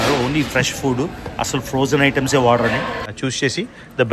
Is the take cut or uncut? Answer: cut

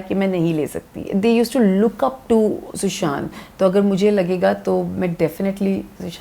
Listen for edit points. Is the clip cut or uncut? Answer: cut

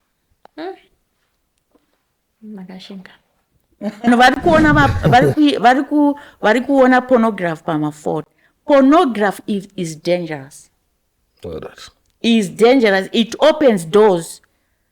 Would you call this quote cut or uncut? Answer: cut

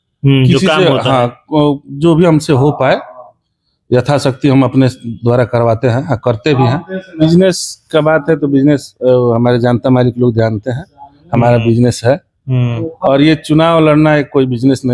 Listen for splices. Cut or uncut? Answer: cut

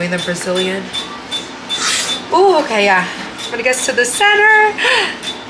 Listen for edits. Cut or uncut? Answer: uncut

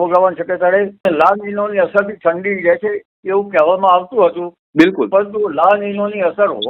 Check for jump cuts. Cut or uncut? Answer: cut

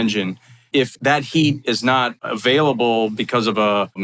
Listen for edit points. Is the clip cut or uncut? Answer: cut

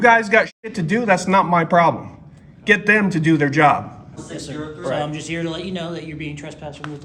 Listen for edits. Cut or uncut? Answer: cut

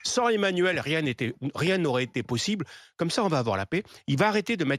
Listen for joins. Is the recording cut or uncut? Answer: uncut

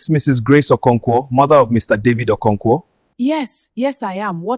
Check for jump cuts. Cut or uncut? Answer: cut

